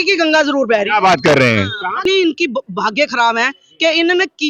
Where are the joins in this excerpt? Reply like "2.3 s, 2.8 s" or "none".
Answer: 2.0 s